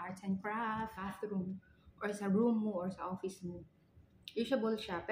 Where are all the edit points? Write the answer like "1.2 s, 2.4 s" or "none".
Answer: 1.1 s